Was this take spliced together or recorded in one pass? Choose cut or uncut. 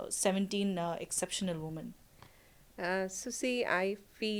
uncut